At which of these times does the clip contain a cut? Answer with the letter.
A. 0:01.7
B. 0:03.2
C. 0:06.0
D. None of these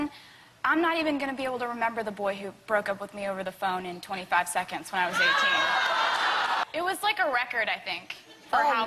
D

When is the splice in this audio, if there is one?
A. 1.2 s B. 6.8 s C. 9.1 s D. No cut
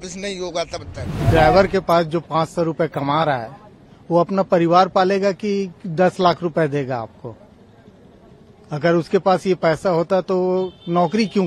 A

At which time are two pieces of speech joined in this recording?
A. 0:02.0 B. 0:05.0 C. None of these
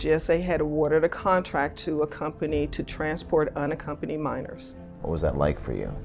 B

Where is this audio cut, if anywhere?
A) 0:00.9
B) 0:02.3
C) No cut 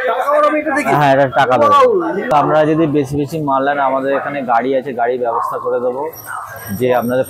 B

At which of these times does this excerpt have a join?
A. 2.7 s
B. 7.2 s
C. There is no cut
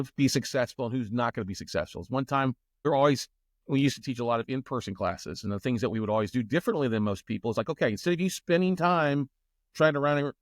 A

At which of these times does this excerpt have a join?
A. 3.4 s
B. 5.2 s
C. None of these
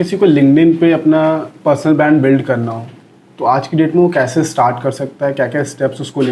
C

